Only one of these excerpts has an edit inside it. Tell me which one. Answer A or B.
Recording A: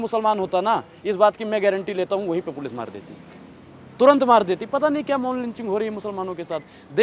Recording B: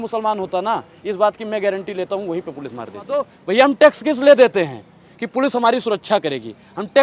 B